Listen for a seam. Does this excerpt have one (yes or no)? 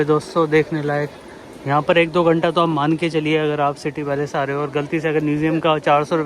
no